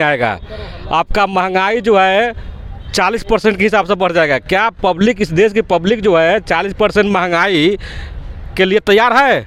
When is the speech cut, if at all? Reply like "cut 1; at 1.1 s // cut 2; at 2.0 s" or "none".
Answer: none